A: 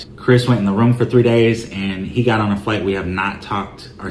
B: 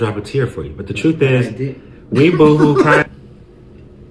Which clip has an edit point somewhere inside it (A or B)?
B